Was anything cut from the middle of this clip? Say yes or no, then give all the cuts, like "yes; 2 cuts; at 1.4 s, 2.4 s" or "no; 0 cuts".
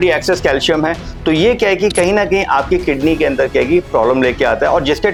no; 0 cuts